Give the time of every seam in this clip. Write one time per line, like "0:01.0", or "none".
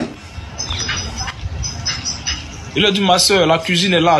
0:02.3